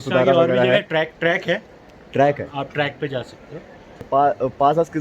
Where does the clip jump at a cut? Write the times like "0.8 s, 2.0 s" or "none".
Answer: 4.0 s